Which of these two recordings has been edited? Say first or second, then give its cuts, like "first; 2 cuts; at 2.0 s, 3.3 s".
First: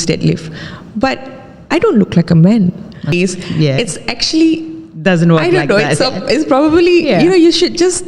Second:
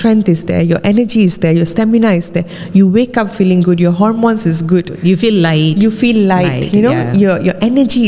first; 1 cut; at 3.1 s